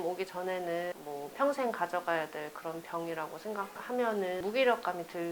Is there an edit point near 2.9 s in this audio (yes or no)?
no